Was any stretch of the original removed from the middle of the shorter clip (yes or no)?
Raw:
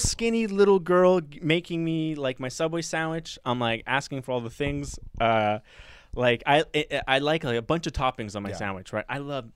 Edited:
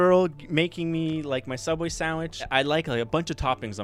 yes